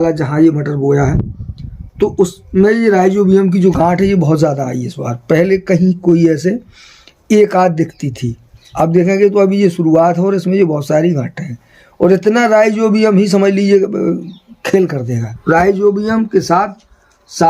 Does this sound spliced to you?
yes; 1 cut; at 15.3 s

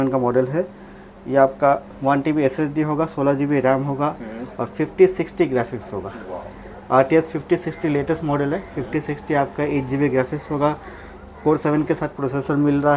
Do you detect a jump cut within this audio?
no; 0 cuts

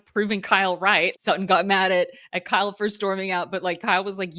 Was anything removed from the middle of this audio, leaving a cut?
yes; 1 cut; at 1.1 s

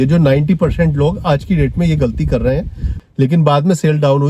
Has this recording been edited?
yes; 1 cut; at 2.9 s

